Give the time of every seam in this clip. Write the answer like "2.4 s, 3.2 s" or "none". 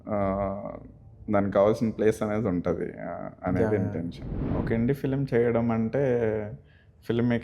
4.5 s